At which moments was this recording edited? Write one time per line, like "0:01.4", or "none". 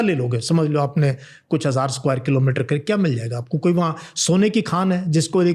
none